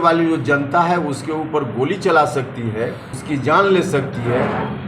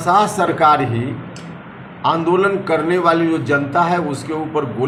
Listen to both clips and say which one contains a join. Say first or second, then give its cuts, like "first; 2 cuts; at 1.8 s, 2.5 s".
first; 1 cut; at 3.1 s